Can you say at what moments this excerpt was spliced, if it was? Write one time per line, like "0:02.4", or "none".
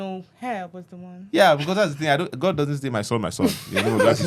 none